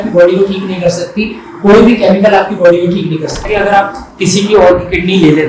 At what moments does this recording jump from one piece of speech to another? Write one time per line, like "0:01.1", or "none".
0:03.4